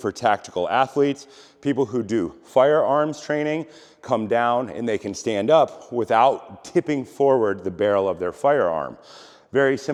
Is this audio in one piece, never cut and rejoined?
yes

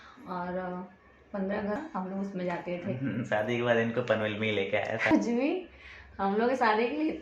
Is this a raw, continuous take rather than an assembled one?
no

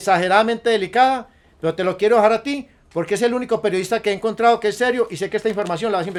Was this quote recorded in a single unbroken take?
yes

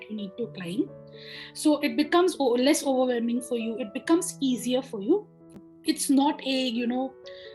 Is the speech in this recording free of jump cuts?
no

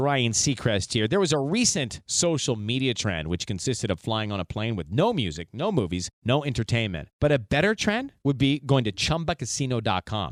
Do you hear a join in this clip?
no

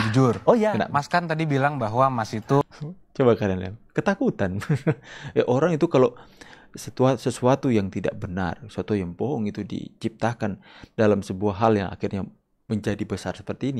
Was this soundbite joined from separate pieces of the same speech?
no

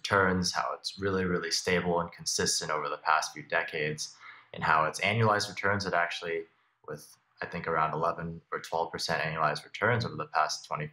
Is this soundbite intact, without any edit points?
yes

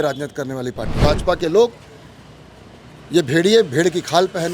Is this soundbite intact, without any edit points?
no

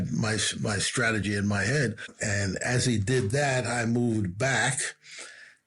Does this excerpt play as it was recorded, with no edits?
no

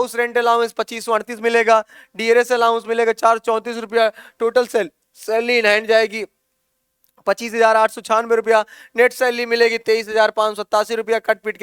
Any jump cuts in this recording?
no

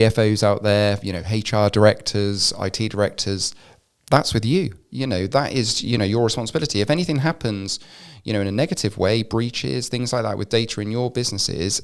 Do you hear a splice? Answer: no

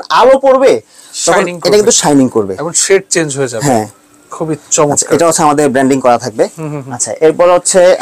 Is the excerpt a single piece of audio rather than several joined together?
yes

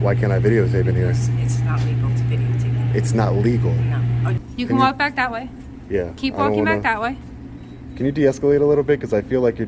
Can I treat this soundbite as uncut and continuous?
no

